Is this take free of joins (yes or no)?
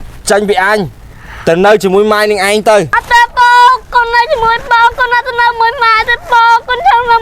no